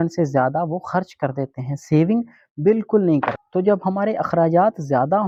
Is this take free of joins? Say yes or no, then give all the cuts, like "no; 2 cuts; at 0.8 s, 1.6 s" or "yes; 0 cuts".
yes; 0 cuts